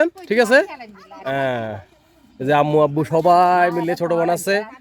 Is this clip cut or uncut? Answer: uncut